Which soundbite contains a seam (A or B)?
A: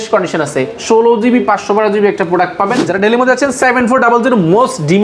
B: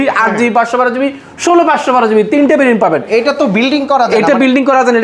A